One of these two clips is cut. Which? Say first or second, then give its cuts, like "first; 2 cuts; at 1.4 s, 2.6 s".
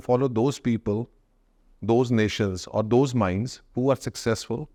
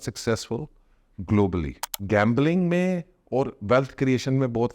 second; 1 cut; at 1.9 s